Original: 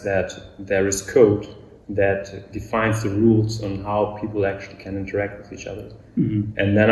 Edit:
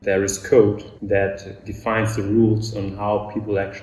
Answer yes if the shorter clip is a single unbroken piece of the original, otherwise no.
no